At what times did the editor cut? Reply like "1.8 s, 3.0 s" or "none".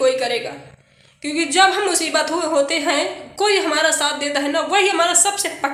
none